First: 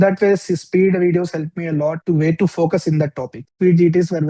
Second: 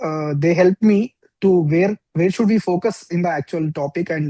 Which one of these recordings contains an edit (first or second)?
first